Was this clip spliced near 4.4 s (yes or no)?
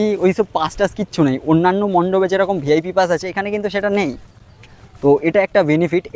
no